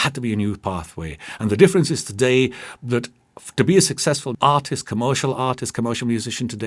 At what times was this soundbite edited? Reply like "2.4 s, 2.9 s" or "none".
4.3 s

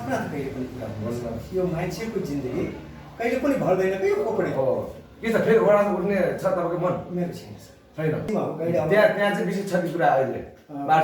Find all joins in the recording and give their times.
8.3 s

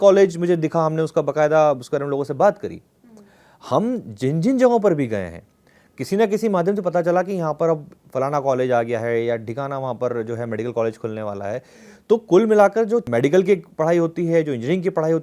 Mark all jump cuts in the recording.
13.1 s

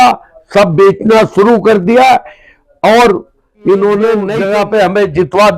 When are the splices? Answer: 4.3 s

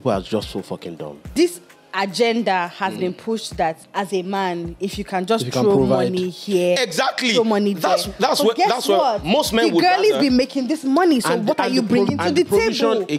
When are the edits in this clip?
1.3 s, 3.8 s

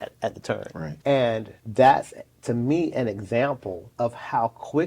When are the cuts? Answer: 0.9 s, 1.6 s, 3.8 s

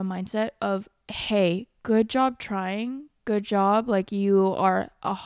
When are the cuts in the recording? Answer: none

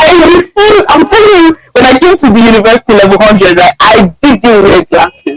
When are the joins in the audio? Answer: none

